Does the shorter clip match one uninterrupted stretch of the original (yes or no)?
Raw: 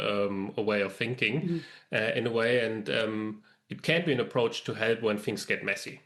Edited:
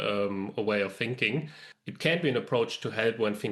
no